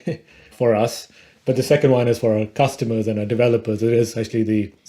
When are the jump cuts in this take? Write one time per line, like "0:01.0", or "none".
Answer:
none